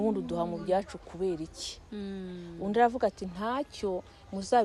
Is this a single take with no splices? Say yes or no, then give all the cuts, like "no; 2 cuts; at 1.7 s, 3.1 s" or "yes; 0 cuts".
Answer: yes; 0 cuts